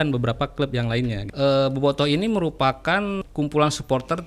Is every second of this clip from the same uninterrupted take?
no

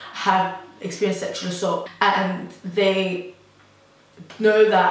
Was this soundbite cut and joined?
yes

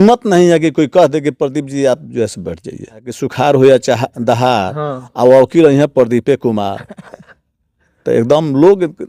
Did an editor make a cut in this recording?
yes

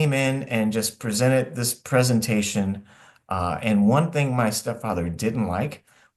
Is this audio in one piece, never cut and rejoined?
yes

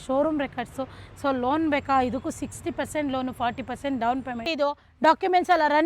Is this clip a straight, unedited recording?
no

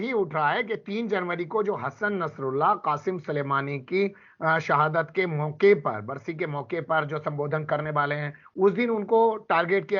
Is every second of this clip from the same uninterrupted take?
yes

